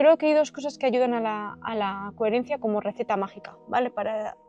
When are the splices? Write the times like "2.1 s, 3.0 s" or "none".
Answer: none